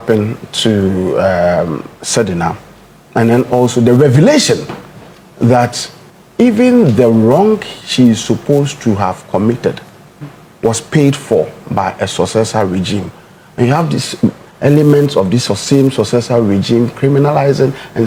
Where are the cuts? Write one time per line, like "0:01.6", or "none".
none